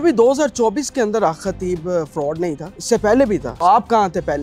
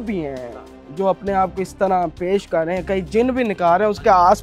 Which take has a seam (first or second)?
first